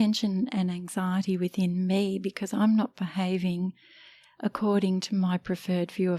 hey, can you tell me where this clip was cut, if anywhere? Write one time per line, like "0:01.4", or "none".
none